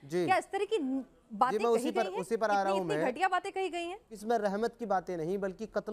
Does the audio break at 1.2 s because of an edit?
no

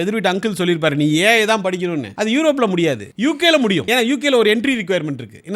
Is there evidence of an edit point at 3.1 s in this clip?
yes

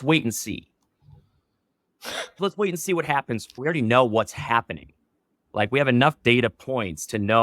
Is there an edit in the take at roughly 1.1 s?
no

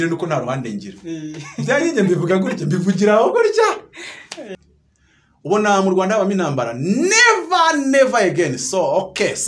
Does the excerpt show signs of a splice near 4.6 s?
yes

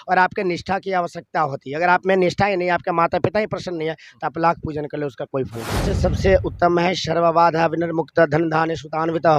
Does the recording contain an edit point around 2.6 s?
no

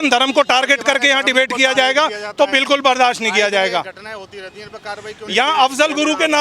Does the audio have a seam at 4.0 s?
no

